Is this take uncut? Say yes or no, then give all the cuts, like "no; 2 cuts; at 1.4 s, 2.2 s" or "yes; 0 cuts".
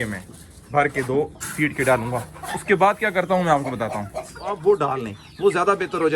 no; 1 cut; at 4.5 s